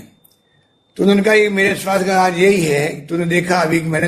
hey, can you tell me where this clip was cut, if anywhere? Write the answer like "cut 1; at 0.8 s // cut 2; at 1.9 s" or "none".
none